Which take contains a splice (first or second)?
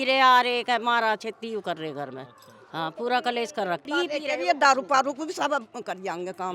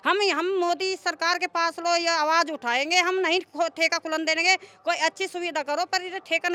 first